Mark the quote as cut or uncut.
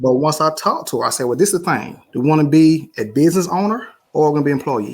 cut